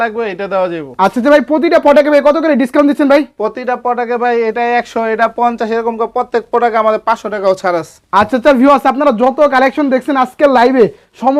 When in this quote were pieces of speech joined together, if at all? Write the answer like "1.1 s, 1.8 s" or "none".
none

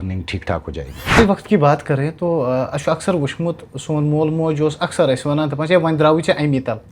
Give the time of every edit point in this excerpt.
1.2 s

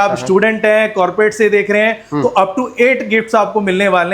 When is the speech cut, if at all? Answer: none

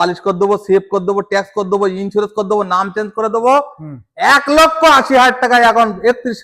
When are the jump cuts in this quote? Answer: none

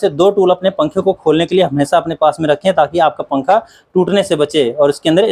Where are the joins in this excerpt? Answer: none

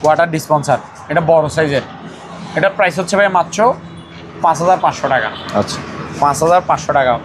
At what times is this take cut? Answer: none

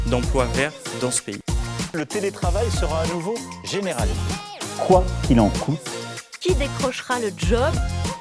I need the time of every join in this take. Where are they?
none

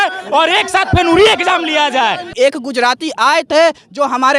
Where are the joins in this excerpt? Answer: 2.3 s

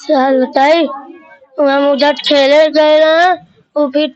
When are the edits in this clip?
none

